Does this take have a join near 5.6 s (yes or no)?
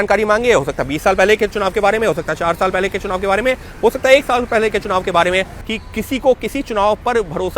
yes